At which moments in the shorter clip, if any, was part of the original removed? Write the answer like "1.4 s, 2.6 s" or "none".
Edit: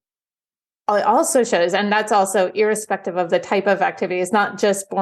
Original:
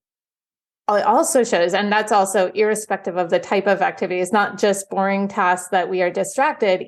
none